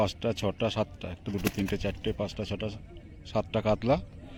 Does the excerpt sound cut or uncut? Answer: uncut